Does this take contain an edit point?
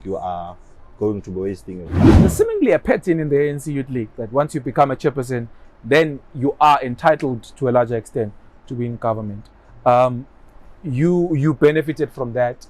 yes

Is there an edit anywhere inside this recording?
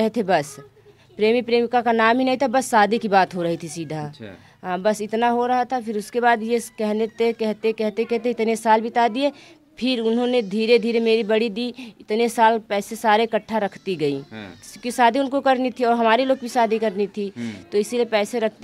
no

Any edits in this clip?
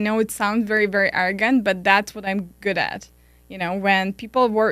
no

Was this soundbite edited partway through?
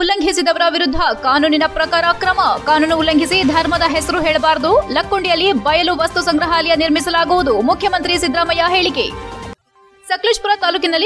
no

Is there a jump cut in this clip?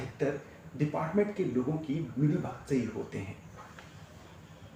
no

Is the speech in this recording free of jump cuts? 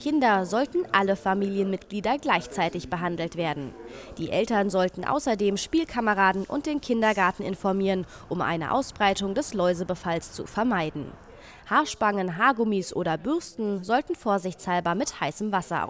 yes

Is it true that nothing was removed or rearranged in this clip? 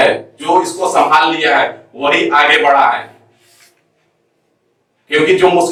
yes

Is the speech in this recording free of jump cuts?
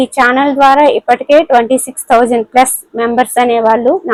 yes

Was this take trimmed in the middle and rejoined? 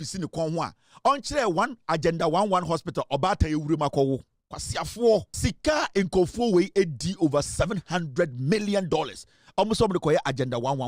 yes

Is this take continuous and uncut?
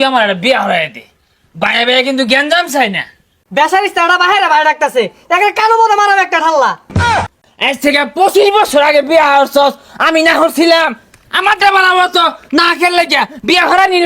no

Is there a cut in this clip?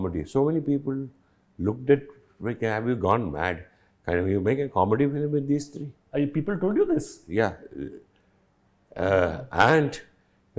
no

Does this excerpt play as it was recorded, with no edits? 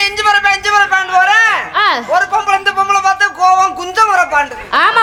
yes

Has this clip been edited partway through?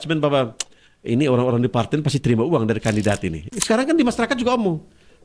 yes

